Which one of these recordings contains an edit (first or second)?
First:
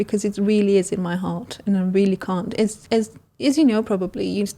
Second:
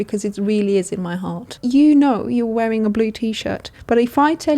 second